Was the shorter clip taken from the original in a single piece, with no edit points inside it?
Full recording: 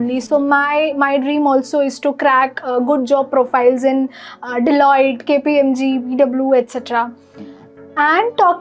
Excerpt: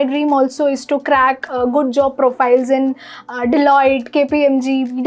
yes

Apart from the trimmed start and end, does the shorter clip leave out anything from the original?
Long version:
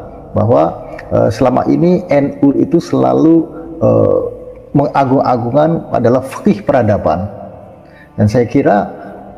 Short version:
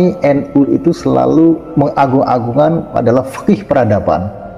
yes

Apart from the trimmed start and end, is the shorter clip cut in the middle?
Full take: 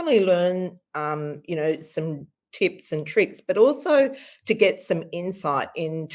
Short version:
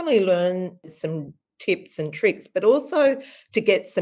yes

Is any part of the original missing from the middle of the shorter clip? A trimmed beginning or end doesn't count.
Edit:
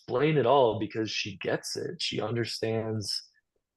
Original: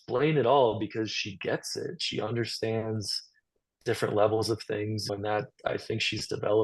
no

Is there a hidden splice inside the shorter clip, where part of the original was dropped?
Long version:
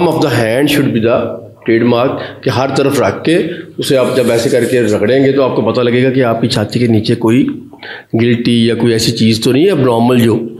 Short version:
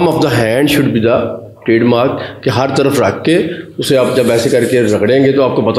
no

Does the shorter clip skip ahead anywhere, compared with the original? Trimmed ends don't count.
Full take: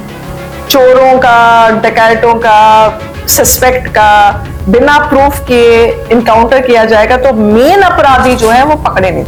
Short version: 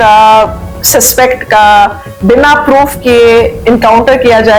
no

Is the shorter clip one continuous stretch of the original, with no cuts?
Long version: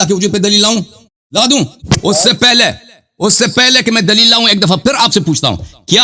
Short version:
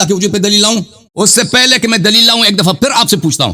no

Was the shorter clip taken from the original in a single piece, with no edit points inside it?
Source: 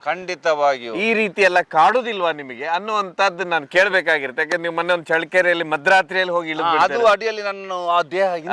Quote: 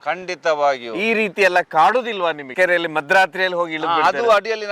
no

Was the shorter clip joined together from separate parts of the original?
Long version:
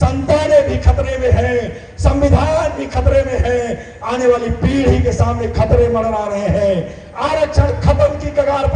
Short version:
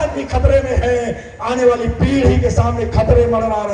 no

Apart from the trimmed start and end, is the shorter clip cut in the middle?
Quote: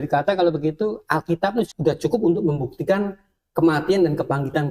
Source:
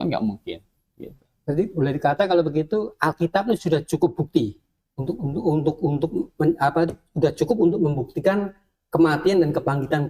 yes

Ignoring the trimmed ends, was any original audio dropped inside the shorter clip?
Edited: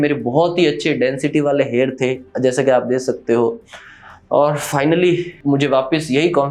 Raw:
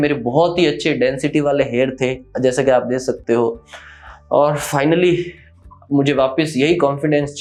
yes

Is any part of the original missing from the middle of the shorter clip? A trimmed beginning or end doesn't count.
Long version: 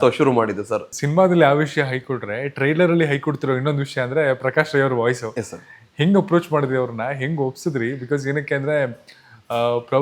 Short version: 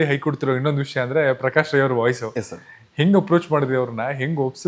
no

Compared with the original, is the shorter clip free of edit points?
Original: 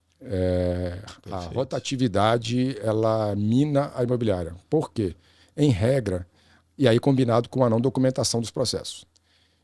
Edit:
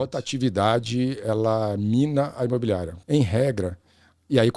no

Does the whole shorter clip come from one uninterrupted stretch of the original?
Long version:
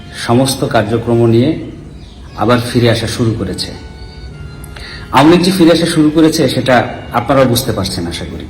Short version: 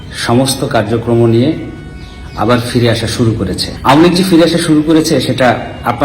no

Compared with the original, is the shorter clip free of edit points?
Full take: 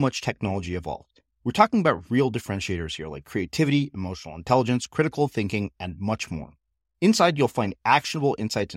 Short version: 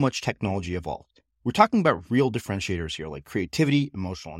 yes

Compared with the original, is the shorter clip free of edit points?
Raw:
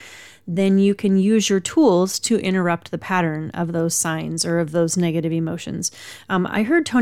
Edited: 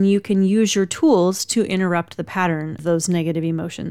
no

